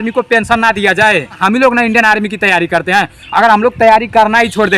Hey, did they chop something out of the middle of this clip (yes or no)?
yes